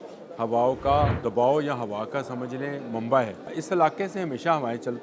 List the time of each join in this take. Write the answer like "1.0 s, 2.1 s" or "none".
1.2 s, 3.6 s